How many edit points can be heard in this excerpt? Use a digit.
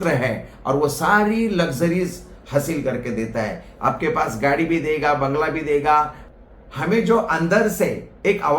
1